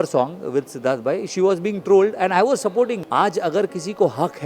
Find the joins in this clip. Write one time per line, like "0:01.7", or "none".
0:03.0

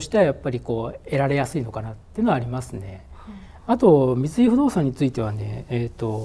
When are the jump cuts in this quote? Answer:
none

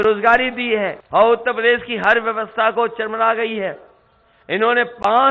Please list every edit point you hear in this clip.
0:01.0

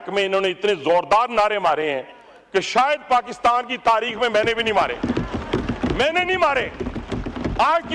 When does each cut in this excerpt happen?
none

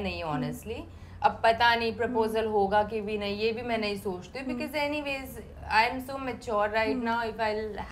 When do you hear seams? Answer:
none

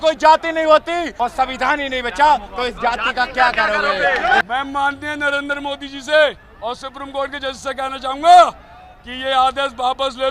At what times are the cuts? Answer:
0:01.0
0:04.4

